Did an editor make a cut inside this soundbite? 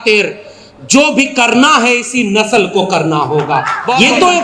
yes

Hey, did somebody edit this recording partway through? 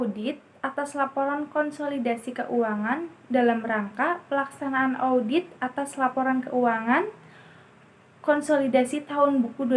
no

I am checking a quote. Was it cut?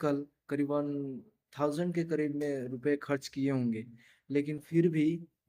no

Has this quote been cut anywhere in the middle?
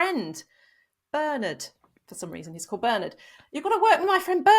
no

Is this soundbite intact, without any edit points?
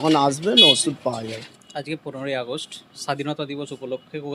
yes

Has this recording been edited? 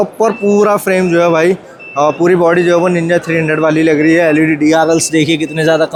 no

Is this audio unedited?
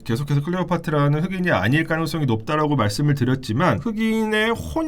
no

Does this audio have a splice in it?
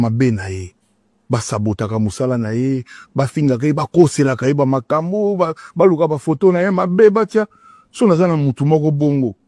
no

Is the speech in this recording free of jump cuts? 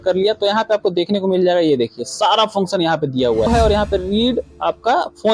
no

